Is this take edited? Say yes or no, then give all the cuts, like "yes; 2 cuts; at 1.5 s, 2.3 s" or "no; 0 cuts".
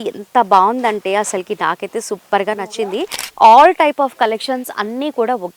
yes; 1 cut; at 3.2 s